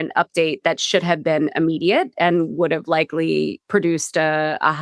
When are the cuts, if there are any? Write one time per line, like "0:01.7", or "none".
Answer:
none